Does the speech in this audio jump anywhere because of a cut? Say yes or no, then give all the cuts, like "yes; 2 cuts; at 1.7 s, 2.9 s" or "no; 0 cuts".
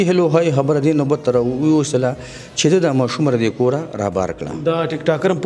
no; 0 cuts